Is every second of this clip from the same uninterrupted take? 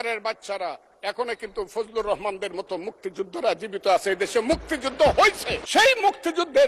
no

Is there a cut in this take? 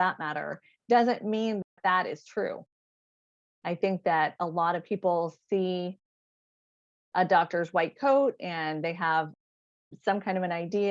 no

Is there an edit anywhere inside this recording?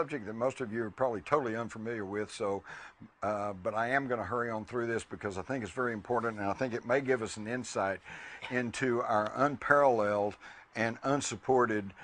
yes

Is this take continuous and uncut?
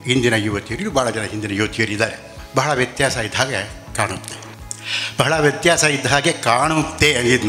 yes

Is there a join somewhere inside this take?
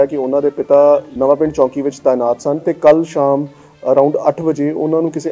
yes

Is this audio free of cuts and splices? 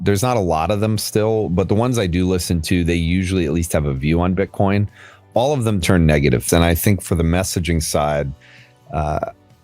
no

